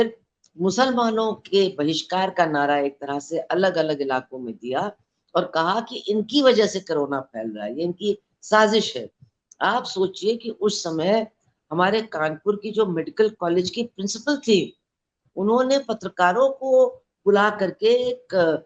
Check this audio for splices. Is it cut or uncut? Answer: uncut